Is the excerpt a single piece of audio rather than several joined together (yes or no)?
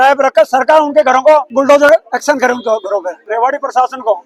no